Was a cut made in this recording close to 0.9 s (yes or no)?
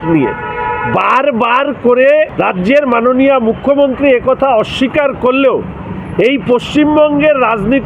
no